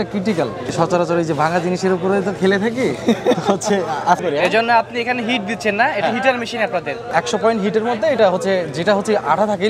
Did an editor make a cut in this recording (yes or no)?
yes